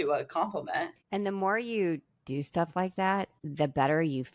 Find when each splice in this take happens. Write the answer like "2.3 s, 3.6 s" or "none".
1.0 s, 3.4 s